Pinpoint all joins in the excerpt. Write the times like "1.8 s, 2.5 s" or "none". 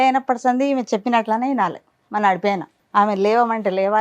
2.7 s